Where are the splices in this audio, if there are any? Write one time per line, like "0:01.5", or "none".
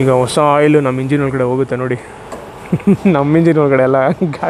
none

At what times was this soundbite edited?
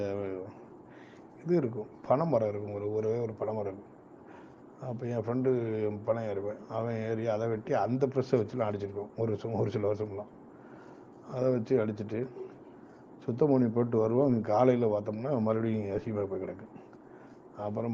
none

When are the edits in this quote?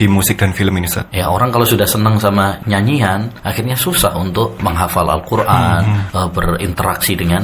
0:01.0
0:02.6
0:03.4
0:04.6
0:06.0

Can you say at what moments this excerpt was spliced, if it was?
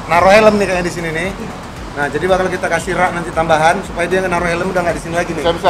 none

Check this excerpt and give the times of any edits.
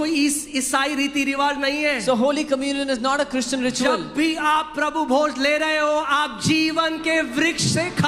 none

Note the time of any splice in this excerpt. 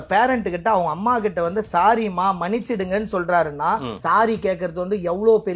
0:04.0

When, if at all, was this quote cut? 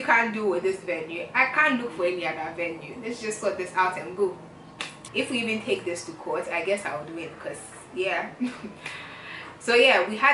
0:05.0

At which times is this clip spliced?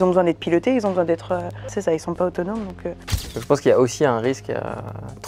0:01.6
0:02.9

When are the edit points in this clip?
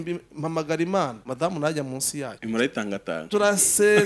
0:01.2
0:02.4

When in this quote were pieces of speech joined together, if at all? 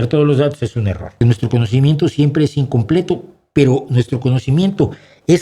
0:01.2

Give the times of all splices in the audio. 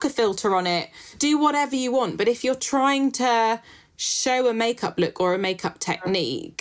0:01.2

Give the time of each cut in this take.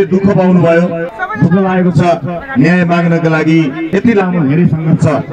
0:01.2
0:03.8

